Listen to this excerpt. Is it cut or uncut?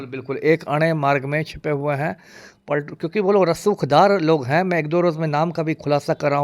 uncut